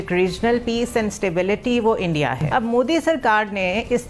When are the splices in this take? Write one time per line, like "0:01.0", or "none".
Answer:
0:02.4